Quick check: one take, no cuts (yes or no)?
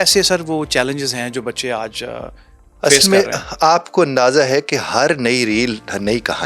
yes